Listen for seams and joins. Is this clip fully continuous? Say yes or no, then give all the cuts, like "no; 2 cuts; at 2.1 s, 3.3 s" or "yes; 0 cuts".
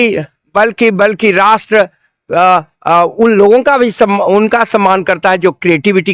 yes; 0 cuts